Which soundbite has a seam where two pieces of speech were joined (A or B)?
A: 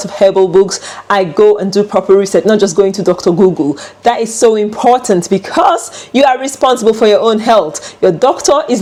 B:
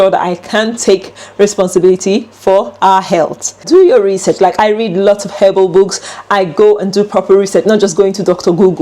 B